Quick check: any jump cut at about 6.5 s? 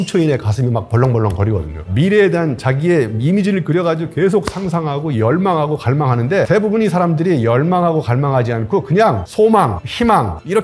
yes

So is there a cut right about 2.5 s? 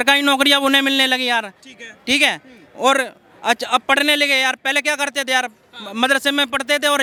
no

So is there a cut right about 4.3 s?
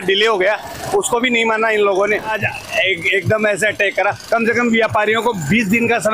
no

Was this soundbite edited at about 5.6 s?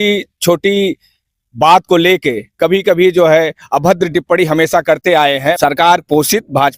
yes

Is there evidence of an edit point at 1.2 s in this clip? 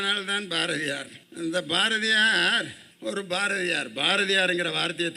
yes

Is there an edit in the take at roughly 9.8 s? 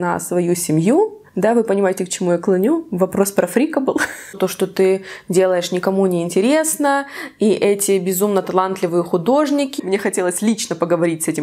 yes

